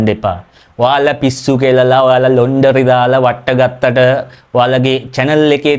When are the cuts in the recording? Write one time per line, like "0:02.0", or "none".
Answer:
none